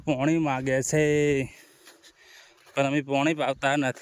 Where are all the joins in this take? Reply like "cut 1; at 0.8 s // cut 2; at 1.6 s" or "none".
none